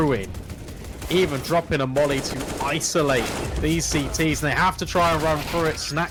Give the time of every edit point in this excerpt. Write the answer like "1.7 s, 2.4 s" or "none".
none